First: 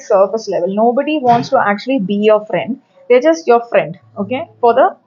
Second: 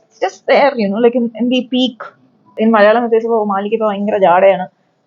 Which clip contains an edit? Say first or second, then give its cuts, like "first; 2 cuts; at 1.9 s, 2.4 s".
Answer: second; 1 cut; at 2.5 s